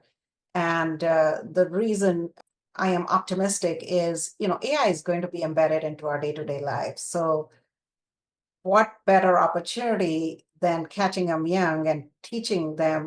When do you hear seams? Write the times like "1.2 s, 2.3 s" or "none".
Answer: 2.4 s